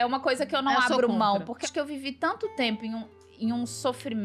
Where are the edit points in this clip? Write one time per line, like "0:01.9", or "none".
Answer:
0:01.6